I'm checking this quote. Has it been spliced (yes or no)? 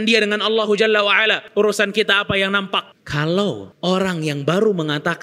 yes